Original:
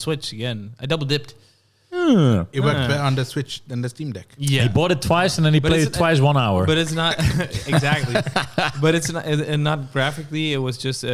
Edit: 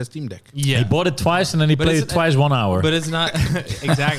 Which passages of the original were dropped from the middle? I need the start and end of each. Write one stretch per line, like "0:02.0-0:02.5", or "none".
none